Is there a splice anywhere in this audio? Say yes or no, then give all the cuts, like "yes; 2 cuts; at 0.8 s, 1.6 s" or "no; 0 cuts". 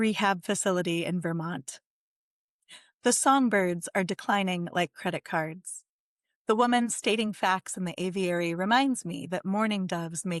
no; 0 cuts